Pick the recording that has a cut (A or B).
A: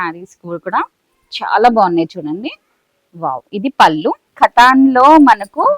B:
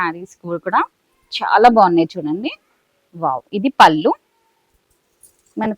A